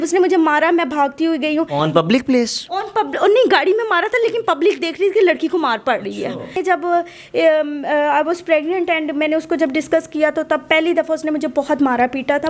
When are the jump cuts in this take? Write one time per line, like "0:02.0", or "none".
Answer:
0:06.6